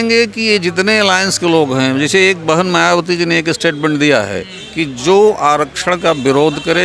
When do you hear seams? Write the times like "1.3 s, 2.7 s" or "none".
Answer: none